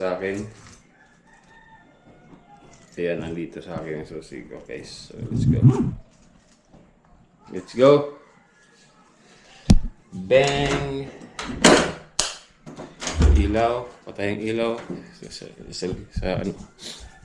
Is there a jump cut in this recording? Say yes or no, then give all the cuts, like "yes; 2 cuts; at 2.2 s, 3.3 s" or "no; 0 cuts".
no; 0 cuts